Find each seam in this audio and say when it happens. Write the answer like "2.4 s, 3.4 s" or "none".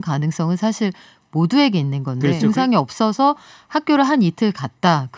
2.4 s